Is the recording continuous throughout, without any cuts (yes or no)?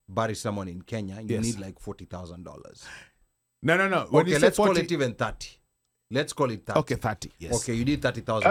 yes